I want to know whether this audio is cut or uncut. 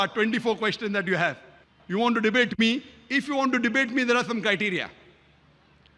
uncut